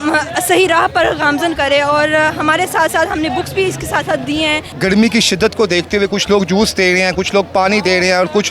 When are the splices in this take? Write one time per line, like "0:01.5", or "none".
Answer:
0:04.8